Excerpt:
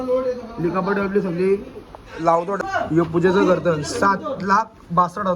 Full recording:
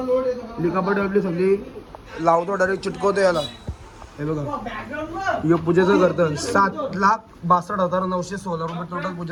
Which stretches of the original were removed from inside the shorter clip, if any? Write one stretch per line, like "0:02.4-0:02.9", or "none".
0:02.6-0:05.1